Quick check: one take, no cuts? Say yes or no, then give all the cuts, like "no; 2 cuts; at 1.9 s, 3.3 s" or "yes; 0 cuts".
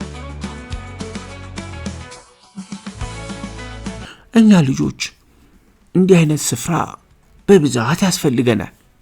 no; 1 cut; at 4.1 s